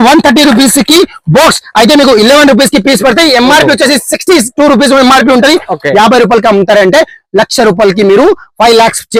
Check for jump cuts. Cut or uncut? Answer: uncut